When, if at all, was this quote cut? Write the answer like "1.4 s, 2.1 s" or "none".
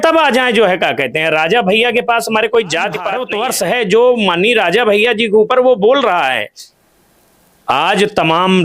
3.2 s